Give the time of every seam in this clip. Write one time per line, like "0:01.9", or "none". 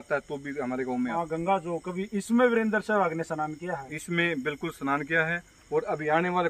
0:01.2